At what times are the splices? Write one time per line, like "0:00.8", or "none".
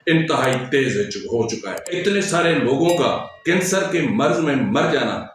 0:01.9